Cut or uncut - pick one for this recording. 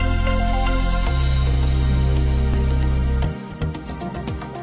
uncut